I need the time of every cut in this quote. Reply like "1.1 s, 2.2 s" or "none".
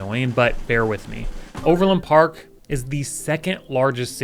none